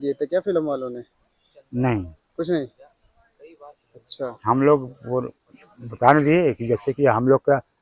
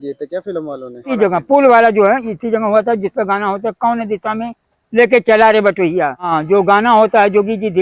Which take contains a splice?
second; 2 cuts; at 1.1 s, 6.4 s

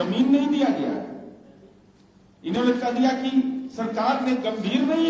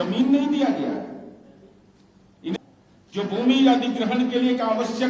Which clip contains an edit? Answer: second; 1 cut; at 2.4 s

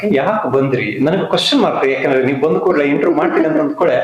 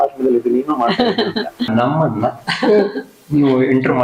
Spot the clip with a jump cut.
second; 1 cut; at 1.7 s

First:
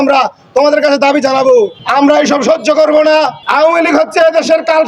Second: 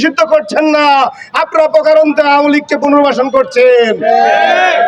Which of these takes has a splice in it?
first; 2 cuts; at 1.8 s, 3.4 s

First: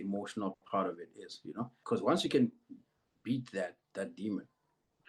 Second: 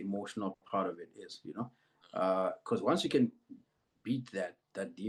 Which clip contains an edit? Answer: first; 1 cut; at 1.8 s

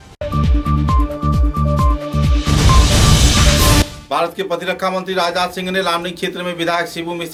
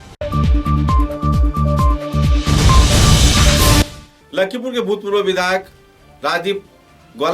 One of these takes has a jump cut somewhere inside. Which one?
second; 1 cut; at 3.9 s

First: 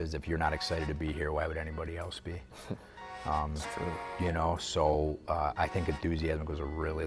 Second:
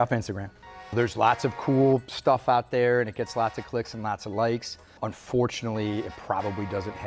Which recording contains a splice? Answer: second; 2 cuts; at 0.9 s, 5.0 s

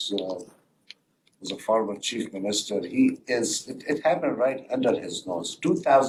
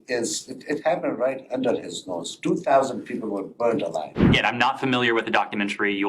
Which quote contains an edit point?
second; 1 cut; at 4.3 s

